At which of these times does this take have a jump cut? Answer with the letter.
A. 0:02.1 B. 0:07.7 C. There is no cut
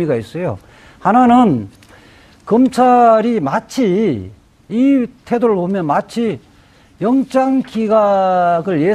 A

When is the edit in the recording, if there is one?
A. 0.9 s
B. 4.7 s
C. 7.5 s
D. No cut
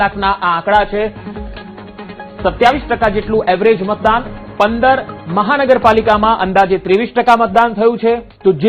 C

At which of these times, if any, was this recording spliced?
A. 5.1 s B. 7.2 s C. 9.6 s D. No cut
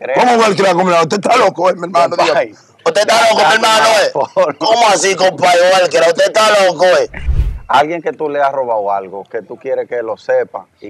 B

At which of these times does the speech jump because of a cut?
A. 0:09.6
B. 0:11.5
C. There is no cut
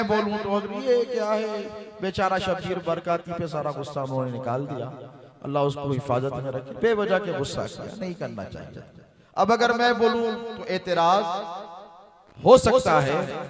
C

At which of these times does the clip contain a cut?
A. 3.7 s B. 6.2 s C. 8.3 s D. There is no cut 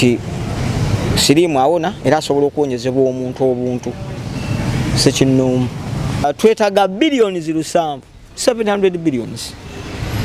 B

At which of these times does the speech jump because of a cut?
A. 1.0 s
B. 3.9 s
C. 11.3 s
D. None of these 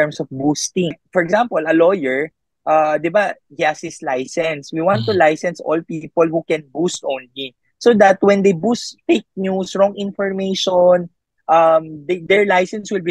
A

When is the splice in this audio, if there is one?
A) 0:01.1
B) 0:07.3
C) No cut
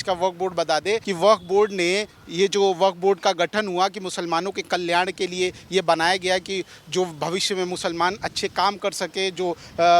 A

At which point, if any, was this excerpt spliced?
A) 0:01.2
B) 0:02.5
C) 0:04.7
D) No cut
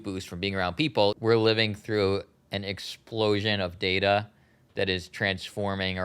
A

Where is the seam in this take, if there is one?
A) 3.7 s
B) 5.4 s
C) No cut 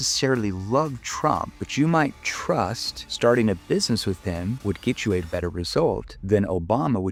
C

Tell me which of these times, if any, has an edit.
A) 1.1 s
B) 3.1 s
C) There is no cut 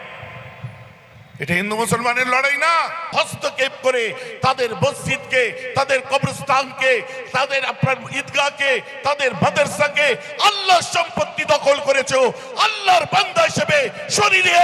B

